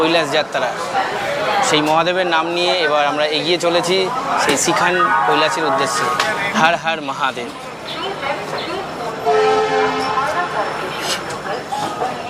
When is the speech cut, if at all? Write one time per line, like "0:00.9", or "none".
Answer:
none